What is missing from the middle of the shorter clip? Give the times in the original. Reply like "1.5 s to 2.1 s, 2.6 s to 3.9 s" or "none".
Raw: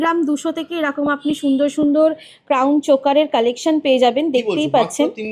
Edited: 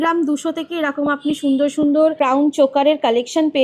2.2 s to 2.5 s